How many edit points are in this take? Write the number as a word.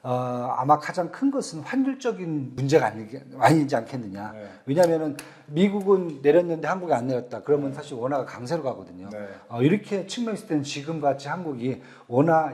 one